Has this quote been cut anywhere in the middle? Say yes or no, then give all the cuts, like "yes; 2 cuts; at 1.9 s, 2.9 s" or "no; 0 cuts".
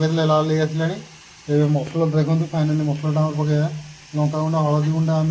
no; 0 cuts